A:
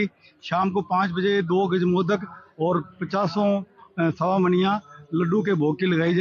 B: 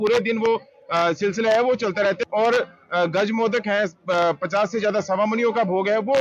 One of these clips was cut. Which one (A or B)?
B